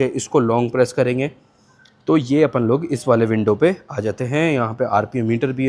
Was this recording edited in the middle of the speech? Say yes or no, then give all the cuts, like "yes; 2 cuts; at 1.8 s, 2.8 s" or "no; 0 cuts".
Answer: no; 0 cuts